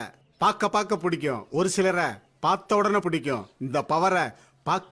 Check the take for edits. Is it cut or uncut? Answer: uncut